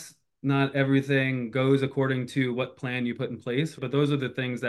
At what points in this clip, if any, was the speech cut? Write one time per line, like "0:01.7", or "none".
0:03.8